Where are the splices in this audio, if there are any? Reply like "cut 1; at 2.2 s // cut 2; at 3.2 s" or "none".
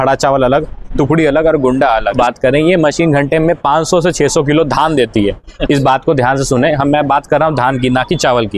cut 1; at 2.1 s